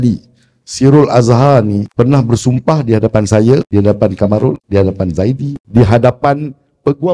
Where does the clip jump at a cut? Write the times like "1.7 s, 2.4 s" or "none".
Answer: 1.9 s, 3.7 s, 4.6 s, 5.5 s